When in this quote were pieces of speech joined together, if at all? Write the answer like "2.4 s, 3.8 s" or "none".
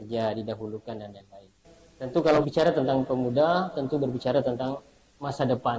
2.4 s